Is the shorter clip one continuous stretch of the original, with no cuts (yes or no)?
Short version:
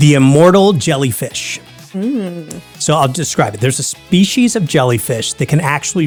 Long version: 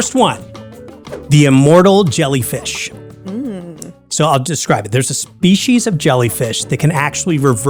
yes